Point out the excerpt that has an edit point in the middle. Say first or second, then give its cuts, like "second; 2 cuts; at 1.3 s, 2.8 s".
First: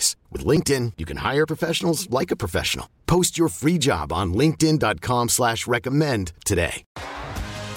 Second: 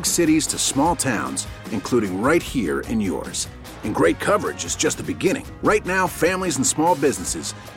first; 1 cut; at 6.8 s